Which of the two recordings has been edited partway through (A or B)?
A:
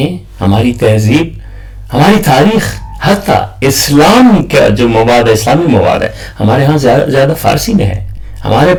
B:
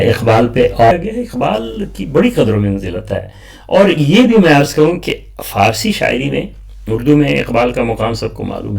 B